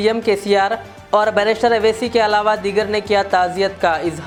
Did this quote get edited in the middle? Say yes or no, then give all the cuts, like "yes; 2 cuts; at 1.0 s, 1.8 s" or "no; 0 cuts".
no; 0 cuts